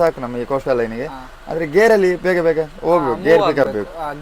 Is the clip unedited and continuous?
yes; 0 cuts

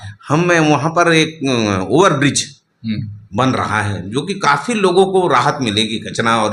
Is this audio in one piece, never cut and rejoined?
yes; 0 cuts

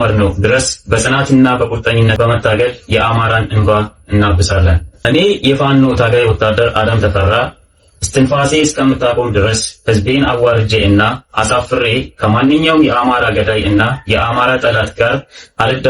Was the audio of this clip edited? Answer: yes; 1 cut; at 5.1 s

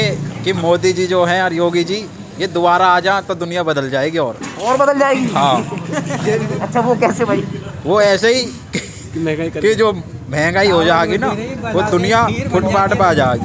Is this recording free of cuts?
yes; 0 cuts

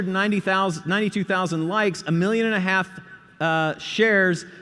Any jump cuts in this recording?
no; 0 cuts

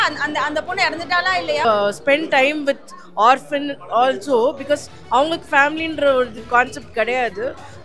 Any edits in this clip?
yes; 1 cut; at 1.6 s

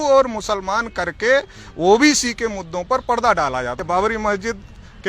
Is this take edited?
yes; 1 cut; at 3.8 s

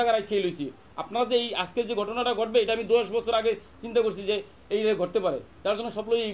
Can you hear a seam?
no; 0 cuts

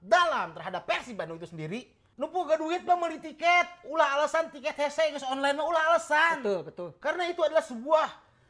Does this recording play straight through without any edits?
no; 1 cut; at 2.0 s

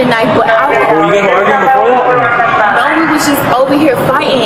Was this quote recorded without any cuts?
yes; 0 cuts

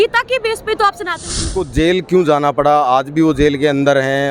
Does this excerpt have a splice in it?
yes; 1 cut; at 1.4 s

